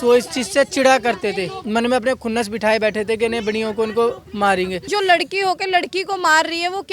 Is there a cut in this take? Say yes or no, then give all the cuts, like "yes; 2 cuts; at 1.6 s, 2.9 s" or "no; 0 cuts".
yes; 2 cuts; at 1.5 s, 4.9 s